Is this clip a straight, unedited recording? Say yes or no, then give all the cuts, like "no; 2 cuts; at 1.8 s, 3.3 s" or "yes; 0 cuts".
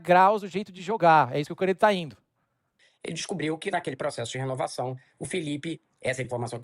no; 1 cut; at 2.7 s